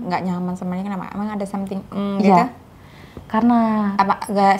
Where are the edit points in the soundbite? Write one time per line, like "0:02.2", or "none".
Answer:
none